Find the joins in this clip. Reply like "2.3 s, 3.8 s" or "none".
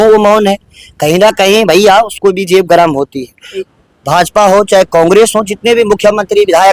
3.7 s